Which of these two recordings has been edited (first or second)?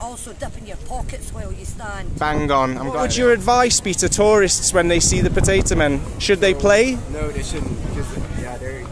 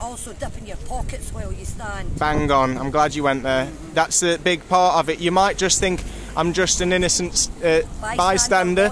first